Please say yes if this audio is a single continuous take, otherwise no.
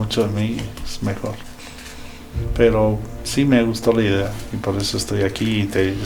yes